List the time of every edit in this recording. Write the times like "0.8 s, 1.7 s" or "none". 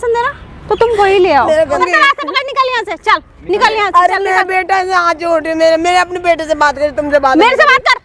1.8 s